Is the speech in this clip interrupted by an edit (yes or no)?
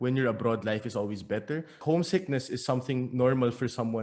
yes